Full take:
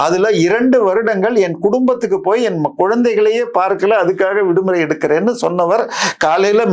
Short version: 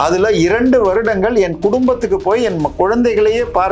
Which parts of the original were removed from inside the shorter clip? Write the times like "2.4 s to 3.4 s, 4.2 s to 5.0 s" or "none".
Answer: none